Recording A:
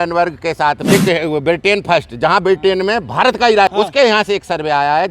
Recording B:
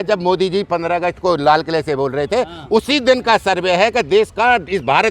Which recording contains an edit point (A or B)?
A